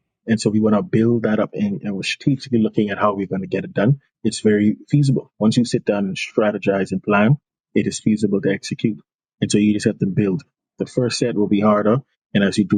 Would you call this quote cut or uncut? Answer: uncut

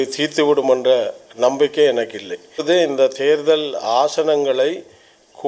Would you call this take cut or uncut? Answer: cut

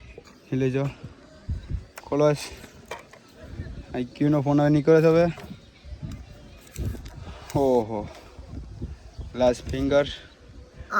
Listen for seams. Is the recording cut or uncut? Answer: uncut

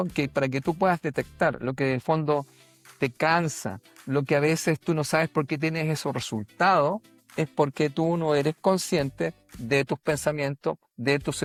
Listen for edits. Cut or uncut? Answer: uncut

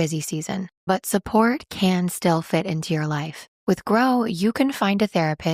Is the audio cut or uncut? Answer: uncut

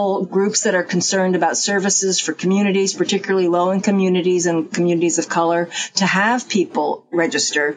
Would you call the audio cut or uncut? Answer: uncut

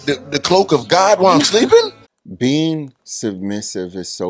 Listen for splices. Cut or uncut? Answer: cut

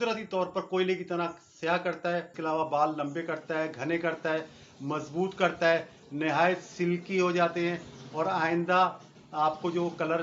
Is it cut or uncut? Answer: cut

